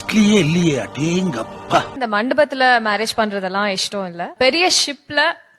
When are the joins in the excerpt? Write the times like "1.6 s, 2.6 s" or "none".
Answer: 1.9 s, 4.3 s